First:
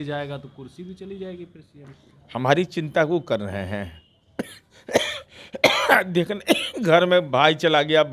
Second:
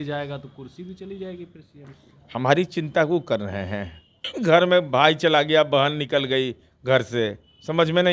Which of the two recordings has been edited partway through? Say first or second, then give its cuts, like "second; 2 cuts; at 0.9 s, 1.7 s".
second; 1 cut; at 4.3 s